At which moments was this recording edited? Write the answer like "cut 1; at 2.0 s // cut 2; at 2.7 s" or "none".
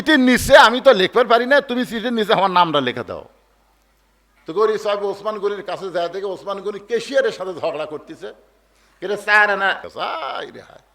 cut 1; at 9.8 s